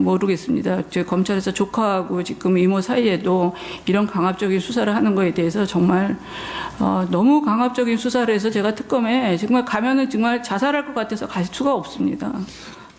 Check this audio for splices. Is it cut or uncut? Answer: uncut